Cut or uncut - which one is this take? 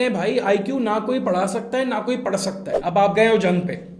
cut